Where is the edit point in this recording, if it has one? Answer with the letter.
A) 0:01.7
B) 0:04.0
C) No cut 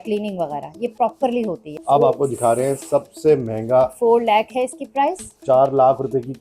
A